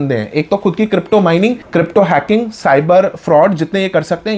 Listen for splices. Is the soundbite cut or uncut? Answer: uncut